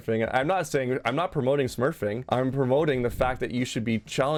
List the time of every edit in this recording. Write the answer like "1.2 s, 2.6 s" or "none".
none